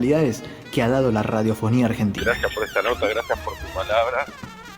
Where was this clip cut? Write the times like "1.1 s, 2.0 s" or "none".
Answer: 2.2 s